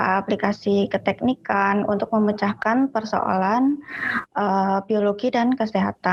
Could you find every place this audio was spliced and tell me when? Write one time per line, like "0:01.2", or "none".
none